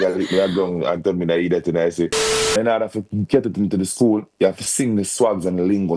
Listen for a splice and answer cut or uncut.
cut